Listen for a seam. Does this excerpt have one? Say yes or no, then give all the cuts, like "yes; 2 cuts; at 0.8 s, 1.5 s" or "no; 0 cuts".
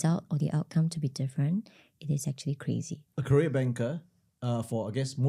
yes; 1 cut; at 3.0 s